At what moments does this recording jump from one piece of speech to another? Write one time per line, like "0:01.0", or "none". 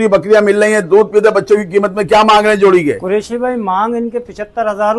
none